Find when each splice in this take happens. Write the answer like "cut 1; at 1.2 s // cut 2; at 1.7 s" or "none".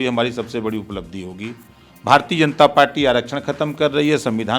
cut 1; at 1.8 s